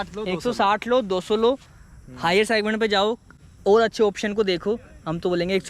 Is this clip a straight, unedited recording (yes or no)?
yes